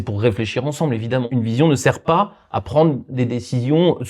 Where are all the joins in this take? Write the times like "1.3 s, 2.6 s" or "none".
1.3 s